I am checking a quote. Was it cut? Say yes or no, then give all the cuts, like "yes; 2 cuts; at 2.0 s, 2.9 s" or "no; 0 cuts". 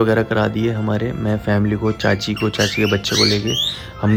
no; 0 cuts